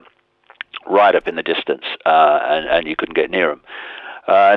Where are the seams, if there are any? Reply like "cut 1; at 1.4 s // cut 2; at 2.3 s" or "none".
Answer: cut 1; at 1.9 s